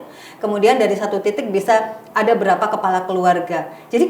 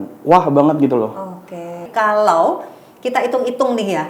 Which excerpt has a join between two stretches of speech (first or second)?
second